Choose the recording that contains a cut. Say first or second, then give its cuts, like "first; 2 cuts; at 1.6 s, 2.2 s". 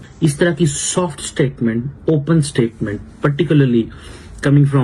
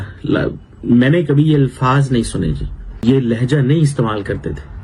second; 1 cut; at 3.0 s